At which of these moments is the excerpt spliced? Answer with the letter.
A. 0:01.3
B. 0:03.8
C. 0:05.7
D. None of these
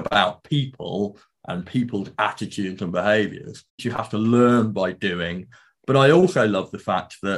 B